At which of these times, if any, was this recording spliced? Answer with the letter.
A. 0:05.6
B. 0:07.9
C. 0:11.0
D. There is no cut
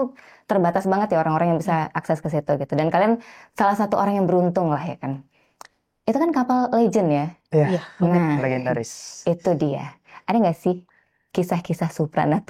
D